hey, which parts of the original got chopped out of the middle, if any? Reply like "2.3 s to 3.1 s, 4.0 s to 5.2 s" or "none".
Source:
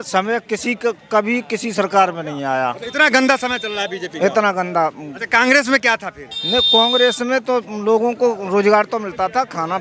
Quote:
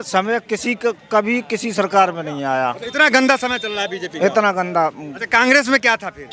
none